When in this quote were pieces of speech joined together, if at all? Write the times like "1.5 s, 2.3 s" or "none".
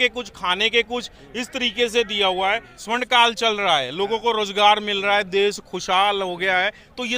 2.7 s